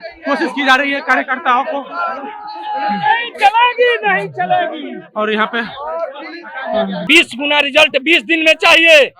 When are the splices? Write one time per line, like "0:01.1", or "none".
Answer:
0:07.0